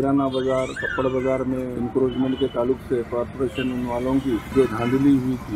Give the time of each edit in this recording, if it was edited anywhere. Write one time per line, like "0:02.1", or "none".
0:01.7
0:04.5